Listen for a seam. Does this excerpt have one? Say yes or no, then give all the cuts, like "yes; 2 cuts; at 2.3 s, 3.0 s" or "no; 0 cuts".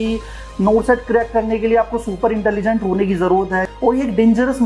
yes; 1 cut; at 3.6 s